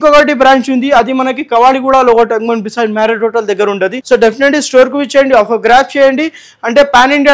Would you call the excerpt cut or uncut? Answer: cut